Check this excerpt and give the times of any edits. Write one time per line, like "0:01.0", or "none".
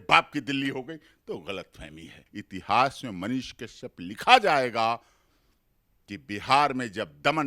0:02.3